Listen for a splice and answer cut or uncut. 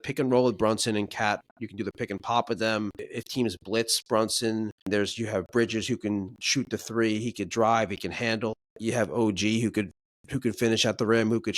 cut